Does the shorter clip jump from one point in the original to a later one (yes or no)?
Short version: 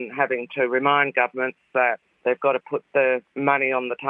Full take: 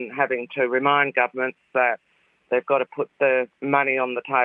yes